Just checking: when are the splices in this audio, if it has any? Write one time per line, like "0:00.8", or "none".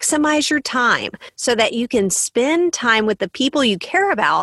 none